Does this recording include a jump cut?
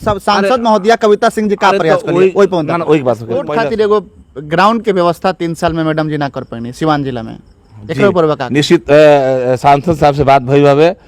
yes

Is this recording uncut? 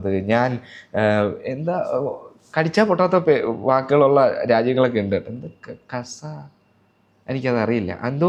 yes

